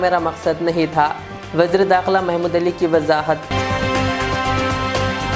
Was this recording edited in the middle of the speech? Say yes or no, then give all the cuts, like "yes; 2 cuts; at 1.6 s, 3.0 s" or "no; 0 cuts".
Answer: no; 0 cuts